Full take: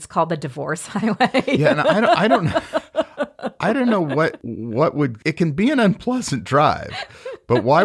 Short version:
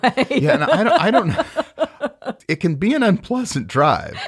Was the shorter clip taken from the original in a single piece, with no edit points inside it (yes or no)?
no